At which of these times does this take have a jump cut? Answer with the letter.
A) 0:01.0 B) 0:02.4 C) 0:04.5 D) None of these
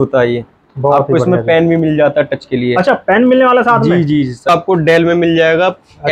C